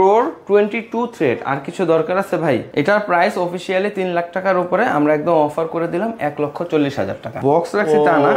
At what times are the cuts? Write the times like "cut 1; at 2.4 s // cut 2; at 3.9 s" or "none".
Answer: cut 1; at 2.7 s // cut 2; at 7.3 s